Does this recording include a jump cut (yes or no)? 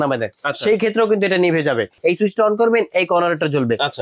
yes